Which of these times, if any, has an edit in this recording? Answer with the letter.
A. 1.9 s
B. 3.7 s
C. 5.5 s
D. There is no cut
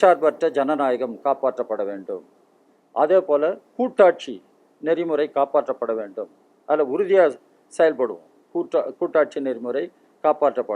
D